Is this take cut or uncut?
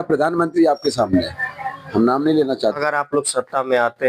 cut